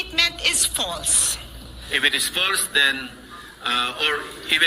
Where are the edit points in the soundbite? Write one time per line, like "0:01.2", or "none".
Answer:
0:01.7